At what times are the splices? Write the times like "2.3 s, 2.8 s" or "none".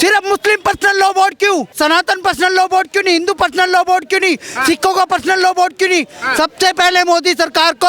1.7 s